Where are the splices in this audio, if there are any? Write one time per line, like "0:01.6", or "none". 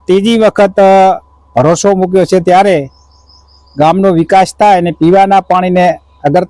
none